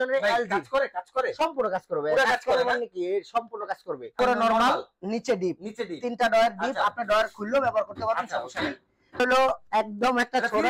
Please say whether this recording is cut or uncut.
cut